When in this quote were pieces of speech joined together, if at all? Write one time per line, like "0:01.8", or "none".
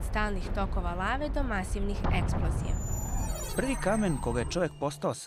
0:03.3